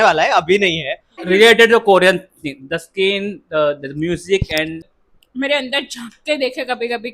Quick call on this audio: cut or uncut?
cut